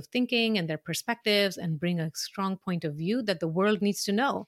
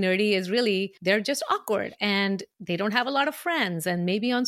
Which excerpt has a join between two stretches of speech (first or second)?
second